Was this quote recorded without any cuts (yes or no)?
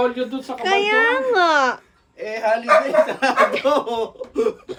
yes